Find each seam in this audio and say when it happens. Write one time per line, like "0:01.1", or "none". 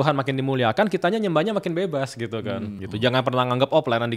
0:02.8